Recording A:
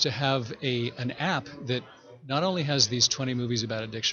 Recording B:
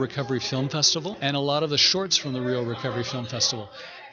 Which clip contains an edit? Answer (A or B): B